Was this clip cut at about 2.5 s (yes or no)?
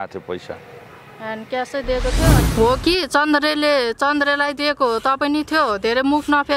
yes